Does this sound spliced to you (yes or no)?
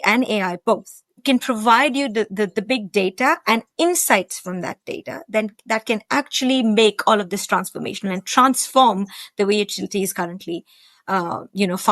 yes